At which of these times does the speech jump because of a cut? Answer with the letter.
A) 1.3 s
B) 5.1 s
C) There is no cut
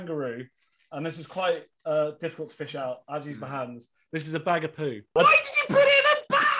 B